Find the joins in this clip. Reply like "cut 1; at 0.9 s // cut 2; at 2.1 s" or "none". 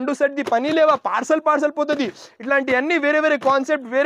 none

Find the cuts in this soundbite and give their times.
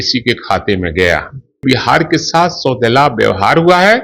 cut 1; at 1.6 s

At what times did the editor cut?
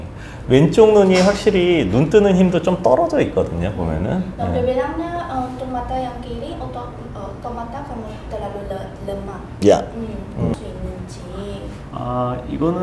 cut 1; at 10.5 s

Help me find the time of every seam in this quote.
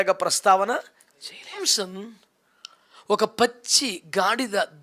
cut 1; at 1.6 s

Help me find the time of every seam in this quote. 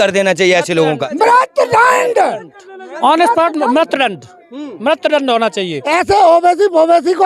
cut 1; at 1.0 s // cut 2; at 5.9 s

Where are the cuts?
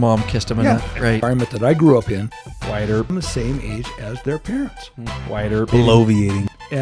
none

